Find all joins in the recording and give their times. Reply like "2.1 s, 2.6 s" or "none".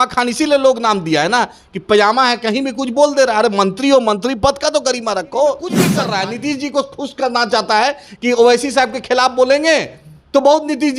5.9 s

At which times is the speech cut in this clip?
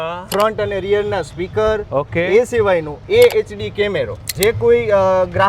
4.3 s

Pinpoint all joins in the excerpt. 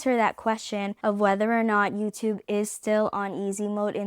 0.9 s

